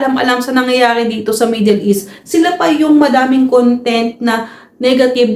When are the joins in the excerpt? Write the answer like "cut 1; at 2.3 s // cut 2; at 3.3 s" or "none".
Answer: none